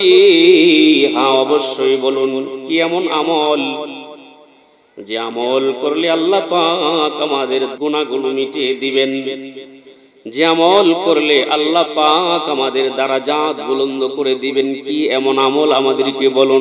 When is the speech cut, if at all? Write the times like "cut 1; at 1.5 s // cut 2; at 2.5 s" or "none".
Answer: cut 1; at 7.7 s